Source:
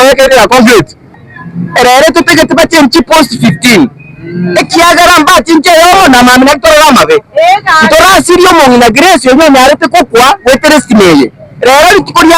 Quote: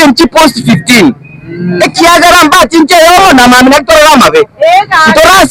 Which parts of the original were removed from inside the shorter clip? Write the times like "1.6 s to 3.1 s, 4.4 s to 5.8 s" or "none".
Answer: none